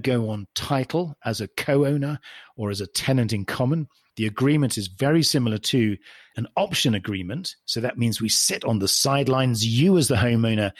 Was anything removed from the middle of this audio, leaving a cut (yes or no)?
yes